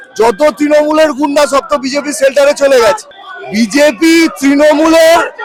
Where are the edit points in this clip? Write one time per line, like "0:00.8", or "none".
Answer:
none